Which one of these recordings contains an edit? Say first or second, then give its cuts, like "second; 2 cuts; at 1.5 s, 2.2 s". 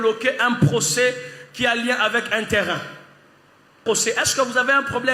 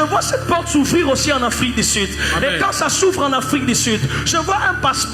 first; 1 cut; at 3.8 s